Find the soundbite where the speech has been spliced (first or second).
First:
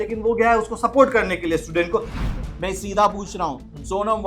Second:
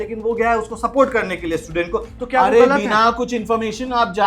first